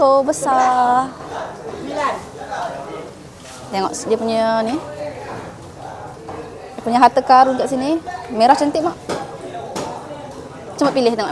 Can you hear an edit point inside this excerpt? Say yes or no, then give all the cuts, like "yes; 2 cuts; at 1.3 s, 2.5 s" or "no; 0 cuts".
no; 0 cuts